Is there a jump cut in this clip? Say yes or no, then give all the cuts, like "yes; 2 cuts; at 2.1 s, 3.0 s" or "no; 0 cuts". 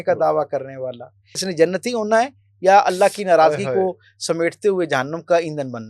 yes; 1 cut; at 1.5 s